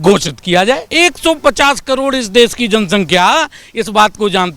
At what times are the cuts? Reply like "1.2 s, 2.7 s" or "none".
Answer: 0.9 s